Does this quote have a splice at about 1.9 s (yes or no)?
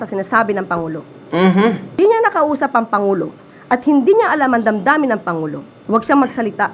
yes